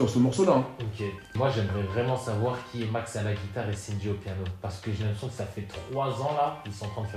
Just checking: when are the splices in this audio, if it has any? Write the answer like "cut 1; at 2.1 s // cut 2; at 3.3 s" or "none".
cut 1; at 1.2 s